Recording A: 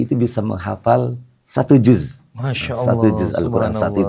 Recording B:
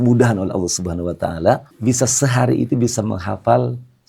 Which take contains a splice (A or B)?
B